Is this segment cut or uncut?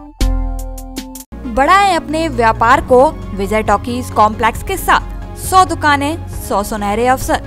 uncut